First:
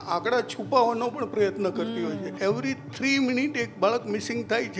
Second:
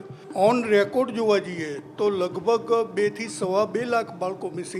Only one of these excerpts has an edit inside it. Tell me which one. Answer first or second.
first